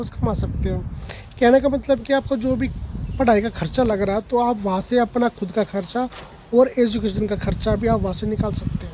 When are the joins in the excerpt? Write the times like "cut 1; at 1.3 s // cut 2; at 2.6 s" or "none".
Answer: none